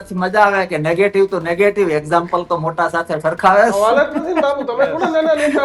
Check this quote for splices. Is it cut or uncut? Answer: uncut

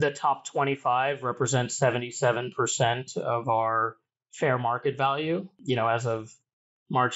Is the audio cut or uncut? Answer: cut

